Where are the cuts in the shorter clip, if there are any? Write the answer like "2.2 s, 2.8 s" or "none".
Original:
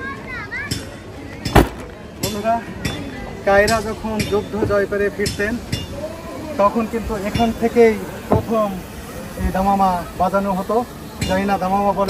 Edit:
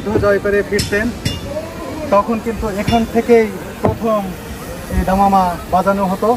none